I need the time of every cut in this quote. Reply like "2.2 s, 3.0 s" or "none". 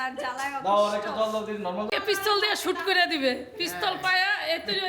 1.9 s